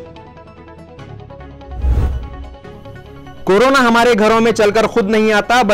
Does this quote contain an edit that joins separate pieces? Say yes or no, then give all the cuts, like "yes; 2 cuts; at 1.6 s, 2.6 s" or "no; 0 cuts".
yes; 1 cut; at 2.0 s